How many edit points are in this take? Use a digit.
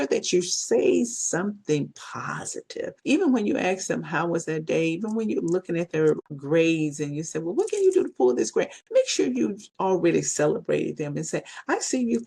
2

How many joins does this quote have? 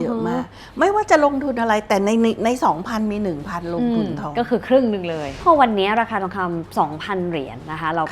1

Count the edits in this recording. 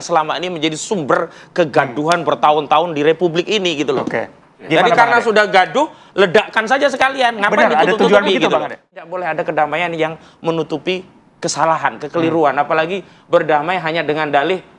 1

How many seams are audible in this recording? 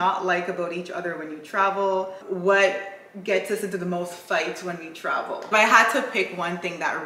2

